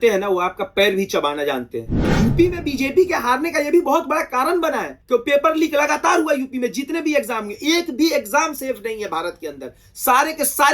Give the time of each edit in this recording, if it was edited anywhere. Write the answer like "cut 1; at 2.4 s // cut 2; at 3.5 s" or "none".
cut 1; at 2.1 s // cut 2; at 4.9 s